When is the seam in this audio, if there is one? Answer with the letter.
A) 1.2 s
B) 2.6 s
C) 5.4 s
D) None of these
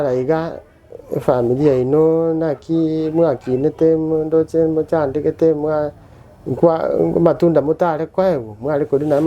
D